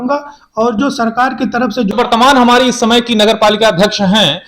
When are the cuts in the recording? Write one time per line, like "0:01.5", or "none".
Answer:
0:01.9